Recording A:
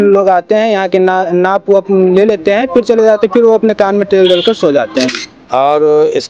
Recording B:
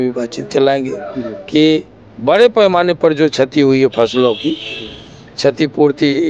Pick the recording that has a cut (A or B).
A